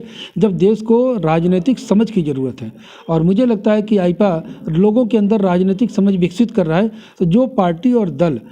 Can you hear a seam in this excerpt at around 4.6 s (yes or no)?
no